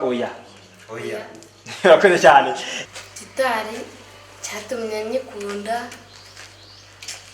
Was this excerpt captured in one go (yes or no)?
no